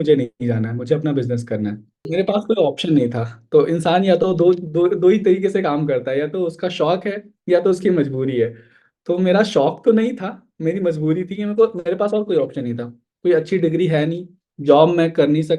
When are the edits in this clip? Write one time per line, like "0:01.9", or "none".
0:02.1